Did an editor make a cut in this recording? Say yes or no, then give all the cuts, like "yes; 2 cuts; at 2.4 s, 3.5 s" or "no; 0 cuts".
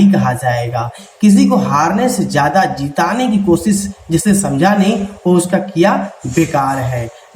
no; 0 cuts